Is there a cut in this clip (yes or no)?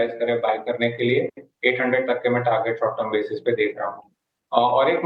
no